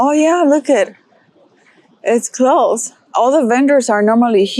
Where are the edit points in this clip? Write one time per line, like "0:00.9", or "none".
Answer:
0:03.1

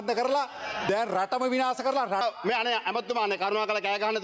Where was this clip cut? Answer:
0:02.2

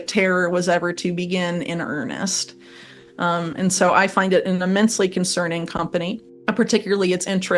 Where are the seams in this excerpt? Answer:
0:06.3

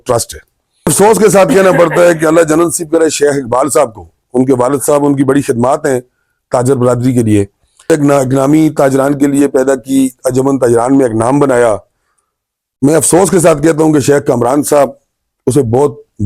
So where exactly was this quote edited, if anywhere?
0:00.9
0:07.9

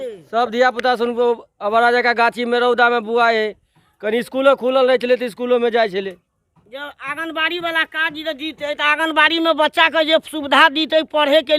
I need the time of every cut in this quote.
none

